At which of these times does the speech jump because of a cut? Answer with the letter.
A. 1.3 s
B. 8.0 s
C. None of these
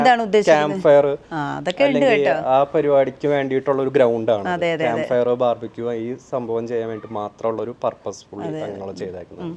C